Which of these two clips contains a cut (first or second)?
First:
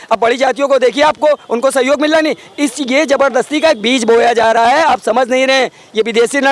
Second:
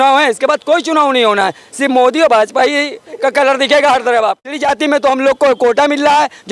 second